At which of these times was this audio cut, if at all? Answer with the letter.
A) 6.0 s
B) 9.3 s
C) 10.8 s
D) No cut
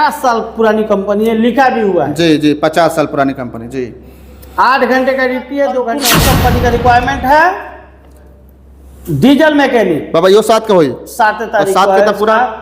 A